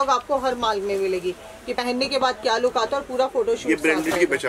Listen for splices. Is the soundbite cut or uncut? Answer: uncut